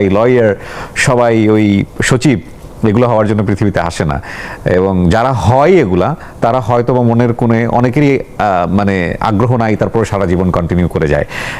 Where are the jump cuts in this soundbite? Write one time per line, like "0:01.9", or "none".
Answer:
none